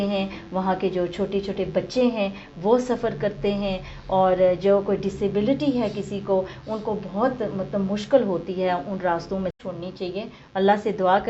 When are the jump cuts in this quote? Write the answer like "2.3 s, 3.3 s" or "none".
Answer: 9.6 s